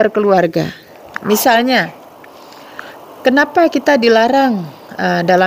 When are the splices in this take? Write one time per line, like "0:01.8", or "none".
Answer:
none